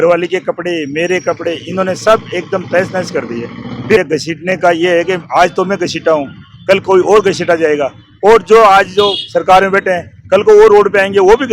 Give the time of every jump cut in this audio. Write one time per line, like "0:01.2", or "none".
0:04.0